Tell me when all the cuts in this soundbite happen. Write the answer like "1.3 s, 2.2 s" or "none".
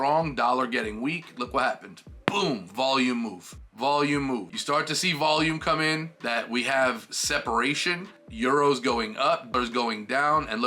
4.5 s, 6.1 s